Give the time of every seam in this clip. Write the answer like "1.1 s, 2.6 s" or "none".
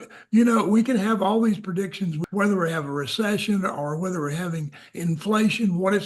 2.2 s